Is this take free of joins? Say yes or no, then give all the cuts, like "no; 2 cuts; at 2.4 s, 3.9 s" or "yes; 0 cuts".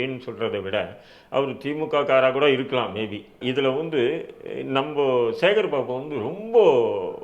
no; 1 cut; at 3.3 s